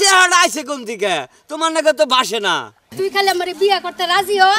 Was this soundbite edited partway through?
yes; 1 cut; at 2.8 s

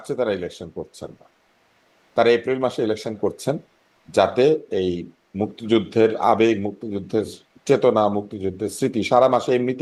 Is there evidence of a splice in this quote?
no; 0 cuts

